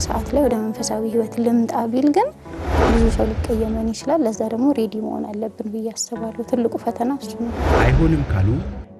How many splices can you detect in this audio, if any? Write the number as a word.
two